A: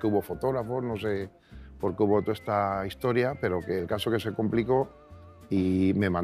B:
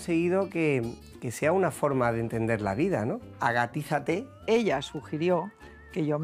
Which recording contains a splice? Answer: B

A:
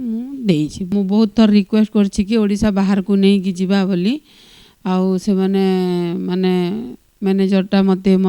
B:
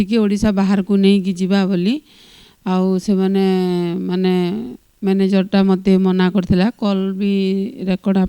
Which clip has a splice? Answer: A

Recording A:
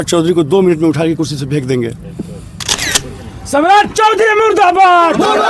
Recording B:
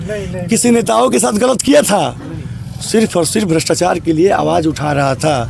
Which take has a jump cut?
A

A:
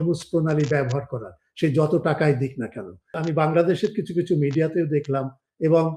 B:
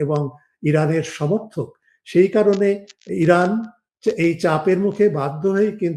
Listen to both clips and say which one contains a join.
A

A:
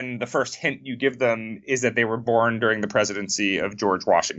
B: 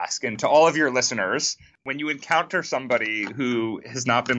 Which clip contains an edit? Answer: B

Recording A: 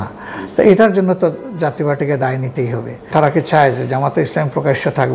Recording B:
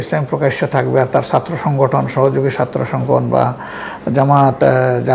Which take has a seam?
A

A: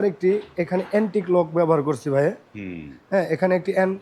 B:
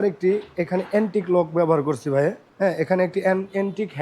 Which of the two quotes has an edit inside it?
B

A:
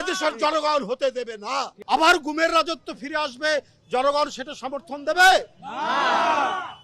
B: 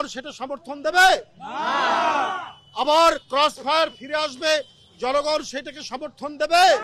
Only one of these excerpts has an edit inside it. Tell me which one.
A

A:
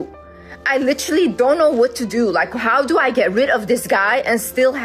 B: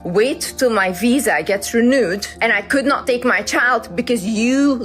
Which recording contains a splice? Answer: B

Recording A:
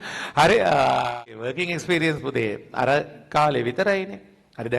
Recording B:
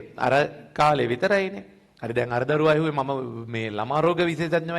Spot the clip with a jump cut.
A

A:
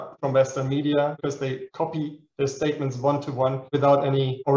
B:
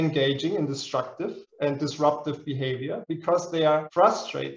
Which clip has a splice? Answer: A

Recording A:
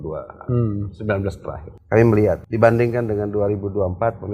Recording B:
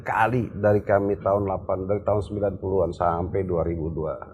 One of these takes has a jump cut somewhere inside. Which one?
A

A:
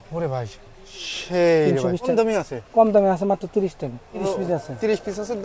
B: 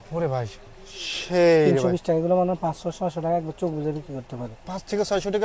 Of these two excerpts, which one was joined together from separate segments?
A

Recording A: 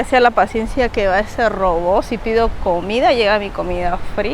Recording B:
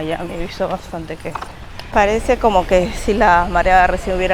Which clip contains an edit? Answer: B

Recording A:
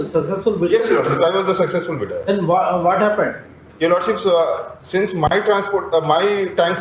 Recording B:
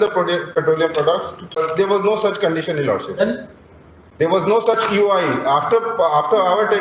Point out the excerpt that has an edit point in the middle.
B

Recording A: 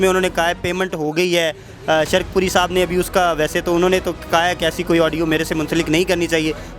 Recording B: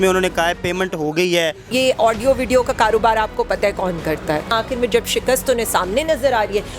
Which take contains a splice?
B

